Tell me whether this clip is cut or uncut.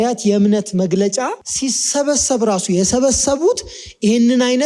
cut